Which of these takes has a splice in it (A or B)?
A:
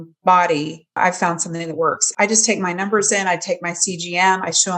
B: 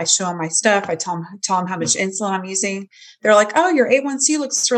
A